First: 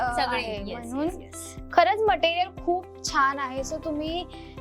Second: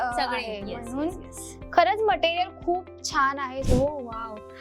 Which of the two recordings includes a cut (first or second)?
second